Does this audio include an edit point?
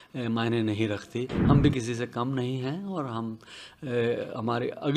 yes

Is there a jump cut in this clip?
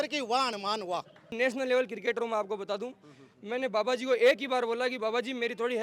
yes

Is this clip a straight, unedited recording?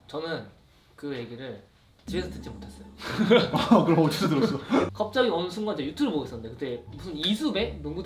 yes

